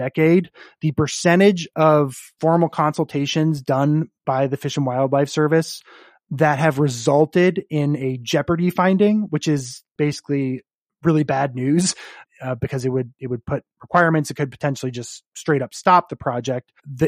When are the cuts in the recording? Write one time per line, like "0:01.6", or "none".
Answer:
0:12.1